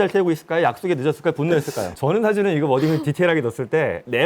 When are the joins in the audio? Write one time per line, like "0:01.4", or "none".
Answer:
0:01.8